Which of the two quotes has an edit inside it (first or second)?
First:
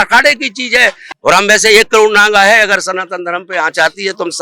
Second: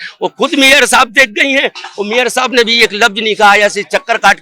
first